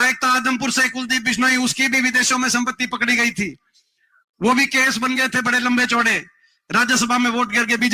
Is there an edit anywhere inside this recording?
no; 0 cuts

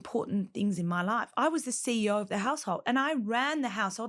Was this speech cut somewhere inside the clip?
no; 0 cuts

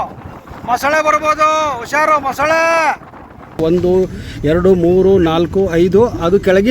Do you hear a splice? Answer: yes; 1 cut; at 3.6 s

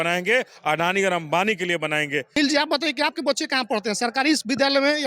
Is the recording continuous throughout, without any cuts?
no; 1 cut; at 2.4 s

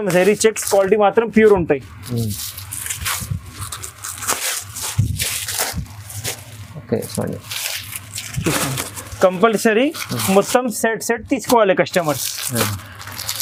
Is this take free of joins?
yes; 0 cuts

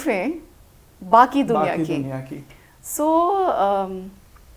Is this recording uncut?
yes; 0 cuts

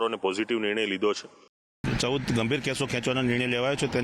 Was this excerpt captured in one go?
no; 1 cut; at 1.6 s

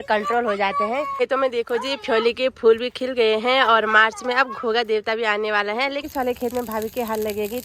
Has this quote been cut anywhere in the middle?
yes; 2 cuts; at 1.1 s, 6.0 s

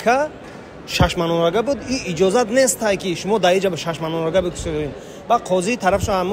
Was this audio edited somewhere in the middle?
no; 0 cuts

